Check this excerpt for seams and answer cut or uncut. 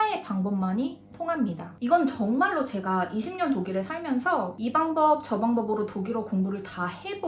uncut